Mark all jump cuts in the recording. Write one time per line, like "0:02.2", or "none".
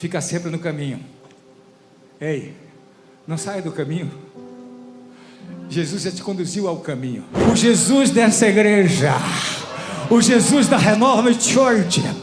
0:07.3